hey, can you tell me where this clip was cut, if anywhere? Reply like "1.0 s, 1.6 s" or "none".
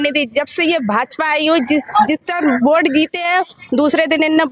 none